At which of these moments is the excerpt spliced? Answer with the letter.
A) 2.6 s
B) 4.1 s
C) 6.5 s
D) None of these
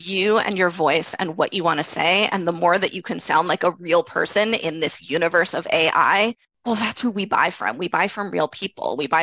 C